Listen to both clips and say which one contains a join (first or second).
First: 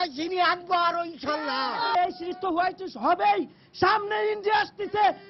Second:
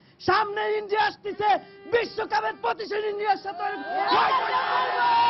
first